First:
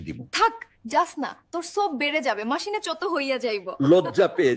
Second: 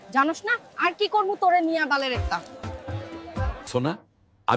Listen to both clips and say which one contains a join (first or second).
second